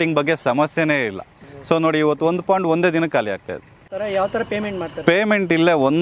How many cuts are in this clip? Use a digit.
0